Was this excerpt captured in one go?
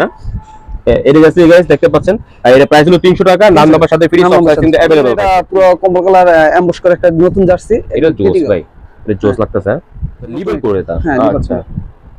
no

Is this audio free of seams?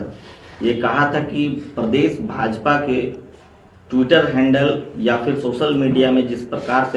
yes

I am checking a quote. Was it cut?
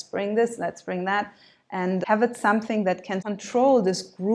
yes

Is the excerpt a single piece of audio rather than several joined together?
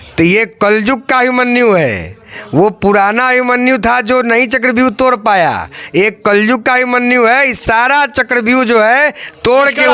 yes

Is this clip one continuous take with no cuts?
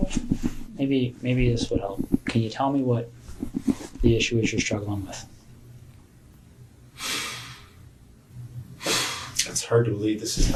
yes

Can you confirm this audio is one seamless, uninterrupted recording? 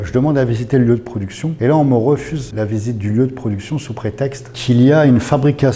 no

